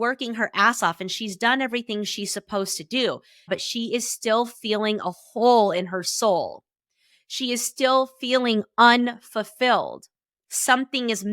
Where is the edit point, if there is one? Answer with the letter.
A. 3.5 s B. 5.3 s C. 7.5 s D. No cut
A